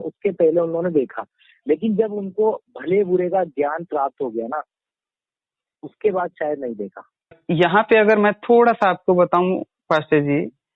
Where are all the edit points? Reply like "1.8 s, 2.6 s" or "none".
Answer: 7.4 s

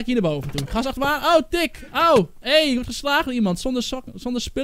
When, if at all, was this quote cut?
none

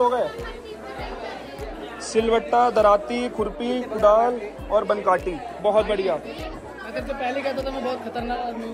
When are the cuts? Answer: none

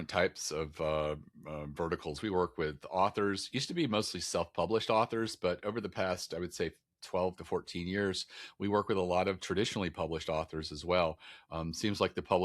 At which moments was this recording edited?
none

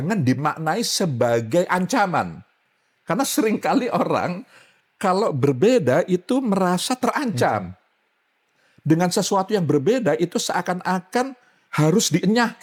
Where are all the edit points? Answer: none

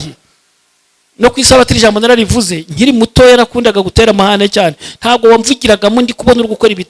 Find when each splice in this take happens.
none

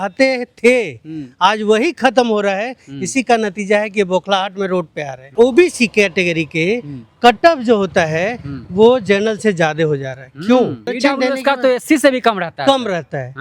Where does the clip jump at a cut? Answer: 5.3 s, 10.9 s

